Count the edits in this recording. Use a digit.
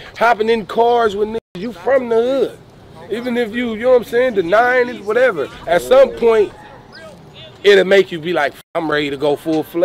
1